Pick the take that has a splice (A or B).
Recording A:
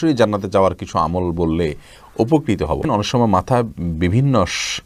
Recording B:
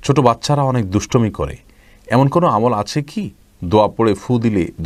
A